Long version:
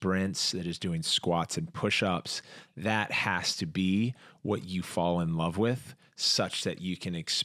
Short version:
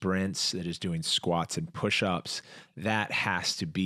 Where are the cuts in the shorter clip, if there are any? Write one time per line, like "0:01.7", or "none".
none